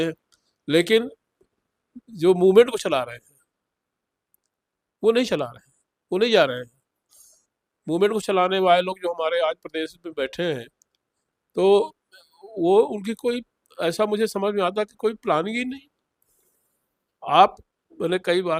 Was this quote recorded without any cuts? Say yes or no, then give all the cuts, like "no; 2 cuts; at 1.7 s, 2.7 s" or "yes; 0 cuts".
yes; 0 cuts